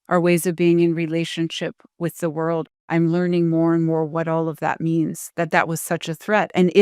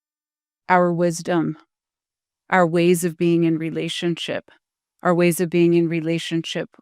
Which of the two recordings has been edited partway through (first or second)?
first